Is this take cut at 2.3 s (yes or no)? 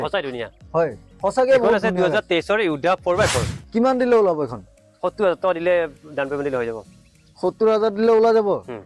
no